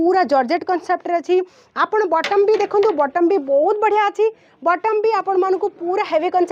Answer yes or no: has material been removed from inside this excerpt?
no